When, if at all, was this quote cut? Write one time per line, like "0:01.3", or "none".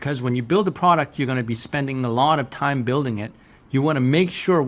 none

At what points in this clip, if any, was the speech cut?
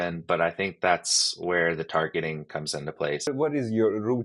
0:03.3

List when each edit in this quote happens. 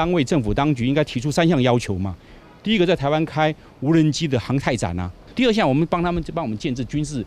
0:05.2

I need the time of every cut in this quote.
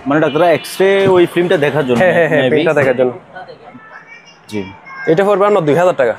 0:03.6

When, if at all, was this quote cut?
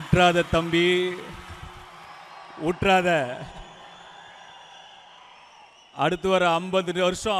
none

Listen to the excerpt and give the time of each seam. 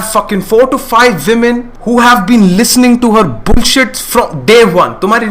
0:01.7

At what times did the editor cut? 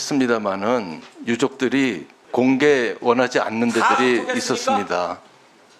0:02.1

